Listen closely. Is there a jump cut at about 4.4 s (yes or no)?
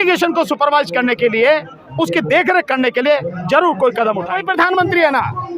yes